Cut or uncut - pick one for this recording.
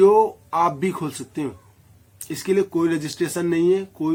uncut